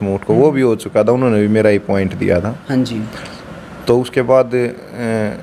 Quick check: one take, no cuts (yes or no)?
yes